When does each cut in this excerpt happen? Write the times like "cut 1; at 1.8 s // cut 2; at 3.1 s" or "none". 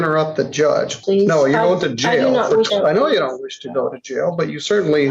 cut 1; at 1.0 s // cut 2; at 2.7 s